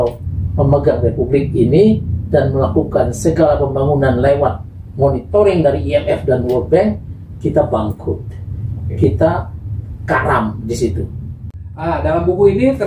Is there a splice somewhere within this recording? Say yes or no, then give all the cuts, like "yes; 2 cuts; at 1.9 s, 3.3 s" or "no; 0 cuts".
yes; 1 cut; at 11.5 s